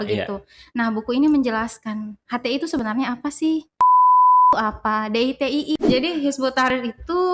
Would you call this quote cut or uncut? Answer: cut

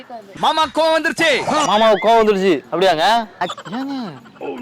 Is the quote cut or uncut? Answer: cut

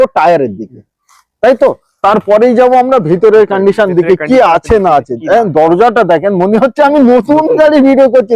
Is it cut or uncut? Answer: uncut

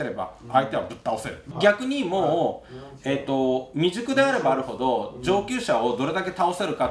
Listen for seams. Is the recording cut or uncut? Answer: cut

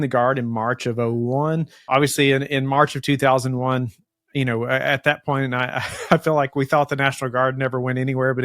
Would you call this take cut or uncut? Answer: cut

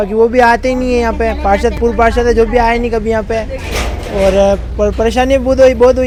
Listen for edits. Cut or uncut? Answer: uncut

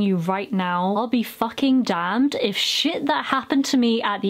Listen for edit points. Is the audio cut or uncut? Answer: cut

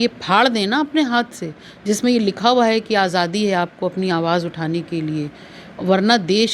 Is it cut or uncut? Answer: uncut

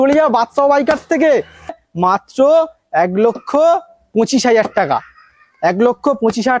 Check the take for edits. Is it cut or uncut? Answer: cut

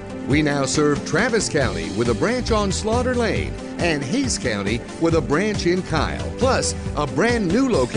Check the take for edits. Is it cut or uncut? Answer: uncut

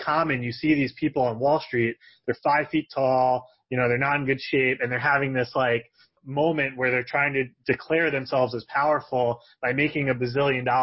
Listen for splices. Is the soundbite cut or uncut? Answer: uncut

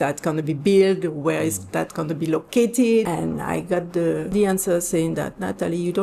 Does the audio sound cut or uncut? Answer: cut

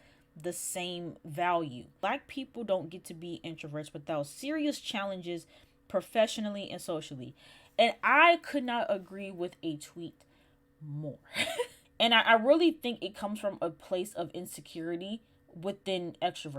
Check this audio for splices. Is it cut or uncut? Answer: cut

